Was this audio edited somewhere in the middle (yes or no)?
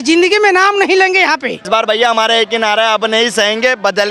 yes